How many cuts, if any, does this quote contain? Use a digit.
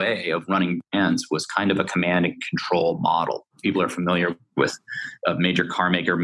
2